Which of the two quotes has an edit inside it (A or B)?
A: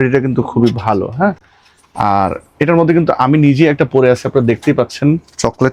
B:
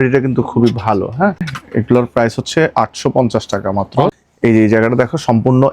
B